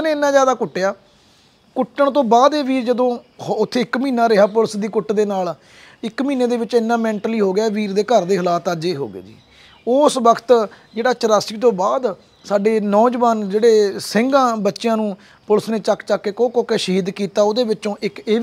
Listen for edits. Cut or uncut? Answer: uncut